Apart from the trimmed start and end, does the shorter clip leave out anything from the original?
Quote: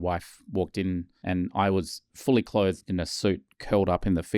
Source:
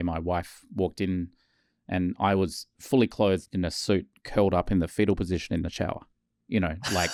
yes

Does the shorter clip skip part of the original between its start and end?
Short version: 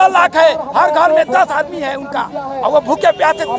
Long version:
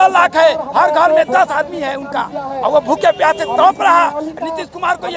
no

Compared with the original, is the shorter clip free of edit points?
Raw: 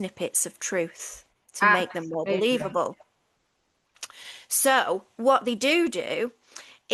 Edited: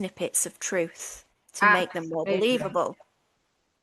yes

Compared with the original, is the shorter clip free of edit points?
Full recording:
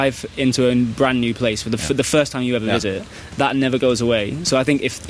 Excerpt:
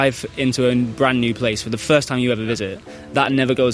no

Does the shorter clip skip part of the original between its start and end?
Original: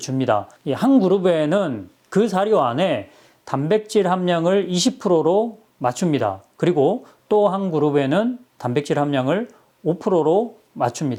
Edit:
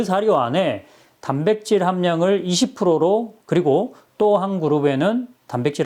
yes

